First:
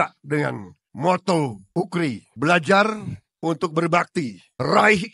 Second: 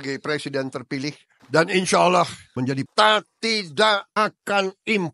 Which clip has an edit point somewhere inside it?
second; 2 cuts; at 1.3 s, 2.7 s

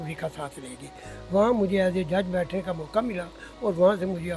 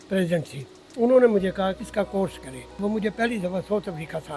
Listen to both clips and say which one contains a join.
second; 2 cuts; at 1.8 s, 2.7 s

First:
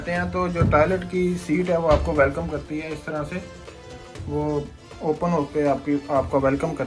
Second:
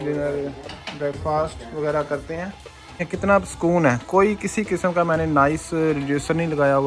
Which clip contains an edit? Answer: second; 1 cut; at 3.0 s

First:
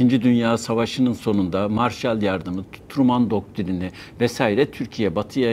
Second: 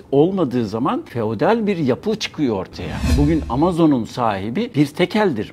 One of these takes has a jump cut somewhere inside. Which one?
second; 3 cuts; at 1.1 s, 3.1 s, 4.7 s

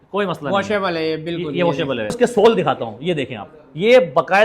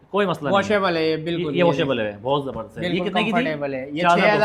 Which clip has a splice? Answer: first; 1 cut; at 2.2 s

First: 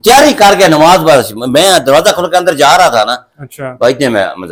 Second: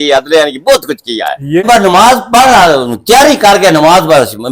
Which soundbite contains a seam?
second; 1 cut; at 1.6 s

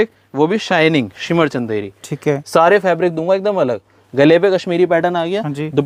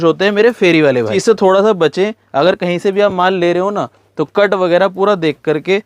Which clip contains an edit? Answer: second; 1 cut; at 1.0 s

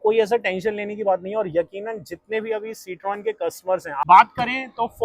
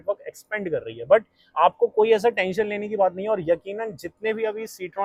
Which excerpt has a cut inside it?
first; 1 cut; at 4.0 s

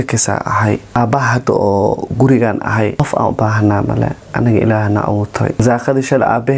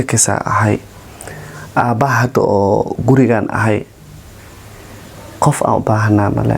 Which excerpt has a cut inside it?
first; 3 cuts; at 1.0 s, 3.0 s, 5.6 s

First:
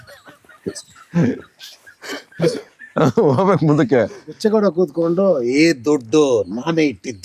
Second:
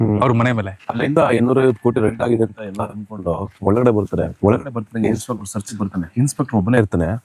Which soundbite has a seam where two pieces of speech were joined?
second; 4 cuts; at 1.0 s, 3.5 s, 4.3 s, 6.1 s

